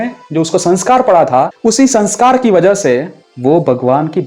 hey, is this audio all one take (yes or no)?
no